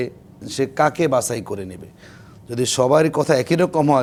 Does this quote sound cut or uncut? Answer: uncut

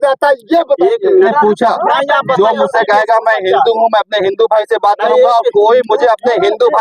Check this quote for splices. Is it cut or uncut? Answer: cut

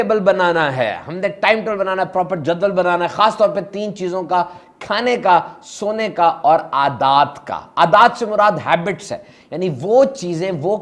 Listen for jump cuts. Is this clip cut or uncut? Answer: uncut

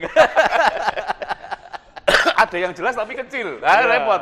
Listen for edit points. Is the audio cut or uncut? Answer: uncut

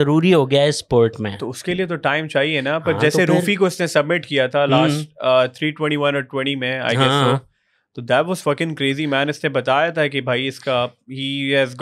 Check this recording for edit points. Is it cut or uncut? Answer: uncut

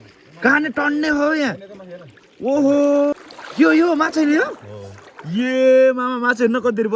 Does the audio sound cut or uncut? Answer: cut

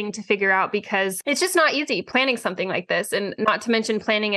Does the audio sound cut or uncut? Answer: cut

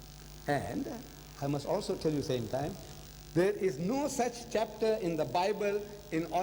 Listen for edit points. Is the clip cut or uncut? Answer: uncut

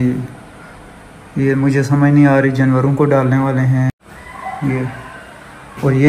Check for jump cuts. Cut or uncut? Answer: cut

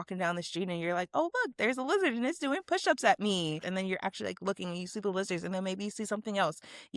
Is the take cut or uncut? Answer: cut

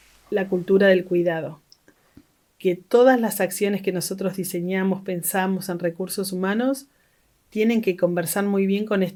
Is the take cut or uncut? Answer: uncut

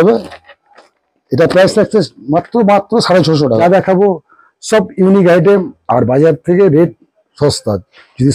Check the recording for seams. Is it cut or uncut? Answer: cut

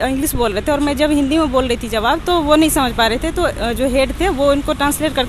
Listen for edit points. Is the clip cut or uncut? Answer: uncut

